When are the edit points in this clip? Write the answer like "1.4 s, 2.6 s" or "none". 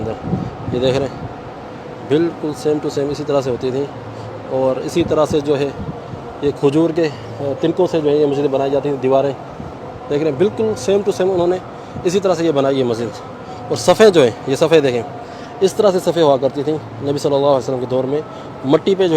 none